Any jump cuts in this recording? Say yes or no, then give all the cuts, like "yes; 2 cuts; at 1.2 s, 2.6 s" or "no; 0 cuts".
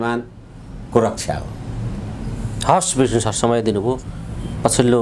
no; 0 cuts